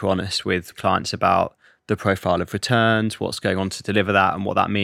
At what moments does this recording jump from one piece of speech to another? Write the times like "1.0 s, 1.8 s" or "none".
0.7 s, 3.4 s

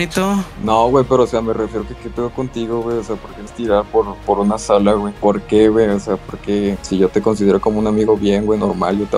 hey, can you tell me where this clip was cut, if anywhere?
5.1 s, 6.8 s

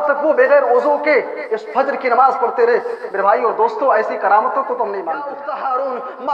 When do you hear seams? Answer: 5.3 s

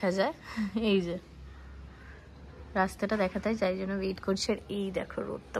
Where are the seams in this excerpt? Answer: none

